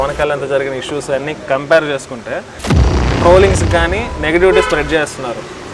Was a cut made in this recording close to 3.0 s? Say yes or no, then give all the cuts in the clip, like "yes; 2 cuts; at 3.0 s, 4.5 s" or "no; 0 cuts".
yes; 1 cut; at 3.0 s